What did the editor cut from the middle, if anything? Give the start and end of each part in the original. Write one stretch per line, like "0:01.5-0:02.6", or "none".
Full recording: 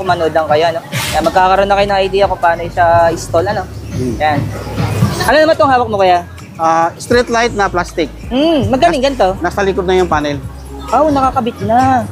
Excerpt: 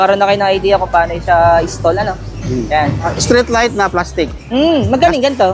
0:04.6-0:07.0